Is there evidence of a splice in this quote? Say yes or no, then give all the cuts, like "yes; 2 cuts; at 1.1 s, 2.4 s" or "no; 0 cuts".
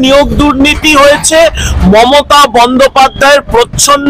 no; 0 cuts